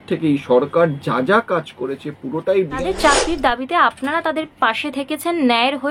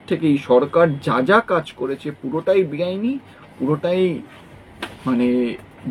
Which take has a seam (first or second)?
first